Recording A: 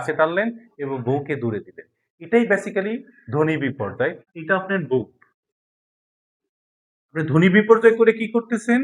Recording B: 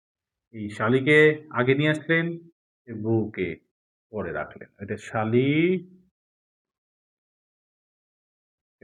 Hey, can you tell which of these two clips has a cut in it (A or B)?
A